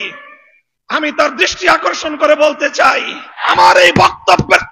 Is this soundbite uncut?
no; 1 cut; at 3.4 s

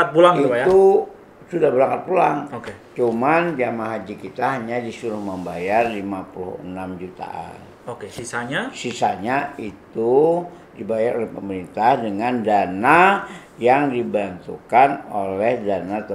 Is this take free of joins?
yes; 0 cuts

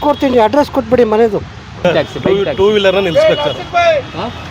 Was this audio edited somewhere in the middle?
yes; 1 cut; at 1.8 s

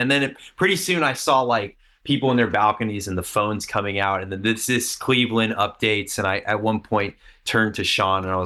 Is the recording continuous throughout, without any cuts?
yes; 0 cuts

